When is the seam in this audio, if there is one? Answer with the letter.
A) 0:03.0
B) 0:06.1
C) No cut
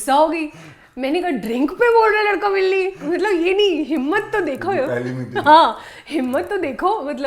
C